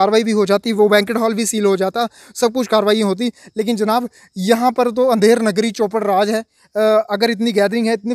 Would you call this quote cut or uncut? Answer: cut